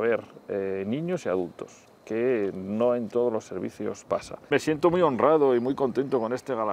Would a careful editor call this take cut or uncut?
cut